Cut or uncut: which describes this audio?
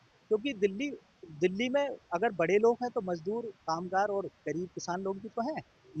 uncut